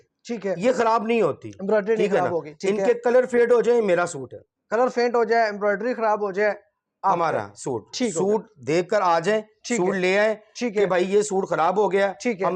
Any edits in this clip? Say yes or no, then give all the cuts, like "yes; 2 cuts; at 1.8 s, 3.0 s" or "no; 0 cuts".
no; 0 cuts